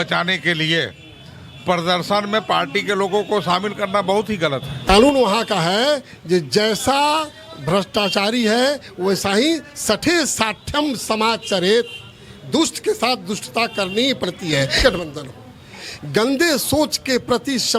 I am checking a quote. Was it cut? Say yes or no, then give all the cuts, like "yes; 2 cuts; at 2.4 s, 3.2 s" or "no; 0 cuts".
yes; 2 cuts; at 4.7 s, 14.8 s